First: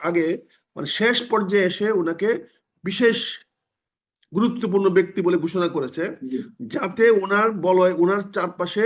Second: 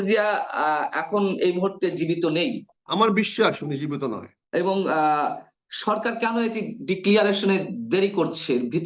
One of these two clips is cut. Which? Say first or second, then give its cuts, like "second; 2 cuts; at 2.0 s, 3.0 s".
second; 2 cuts; at 2.7 s, 4.3 s